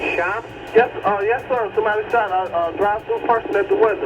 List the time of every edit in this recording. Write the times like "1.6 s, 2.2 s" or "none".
none